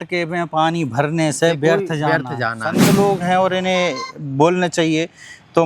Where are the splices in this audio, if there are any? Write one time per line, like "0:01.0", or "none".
0:02.8